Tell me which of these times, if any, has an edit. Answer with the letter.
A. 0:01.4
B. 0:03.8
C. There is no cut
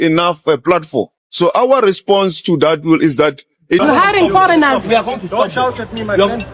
B